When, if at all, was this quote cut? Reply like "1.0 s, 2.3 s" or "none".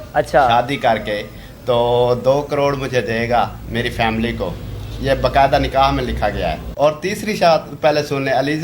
6.6 s